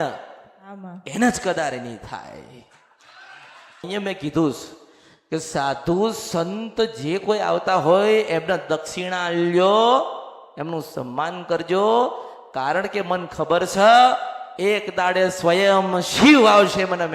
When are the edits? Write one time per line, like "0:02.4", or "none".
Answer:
0:03.8